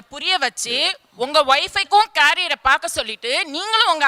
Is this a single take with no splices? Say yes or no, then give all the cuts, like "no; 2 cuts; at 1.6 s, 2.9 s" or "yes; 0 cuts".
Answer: yes; 0 cuts